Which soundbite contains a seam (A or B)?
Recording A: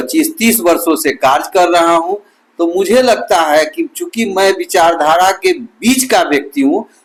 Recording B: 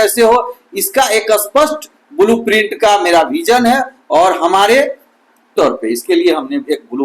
B